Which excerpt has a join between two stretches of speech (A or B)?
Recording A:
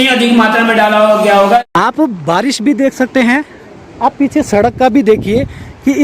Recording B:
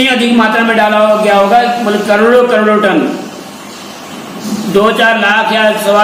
A